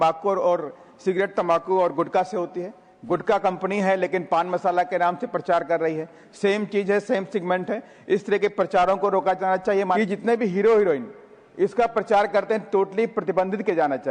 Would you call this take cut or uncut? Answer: cut